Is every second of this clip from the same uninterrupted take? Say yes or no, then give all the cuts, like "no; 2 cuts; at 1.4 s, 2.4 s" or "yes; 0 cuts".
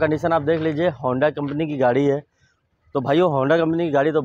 yes; 0 cuts